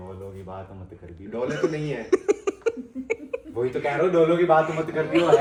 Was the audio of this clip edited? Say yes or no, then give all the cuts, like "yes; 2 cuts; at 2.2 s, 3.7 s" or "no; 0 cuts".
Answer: no; 0 cuts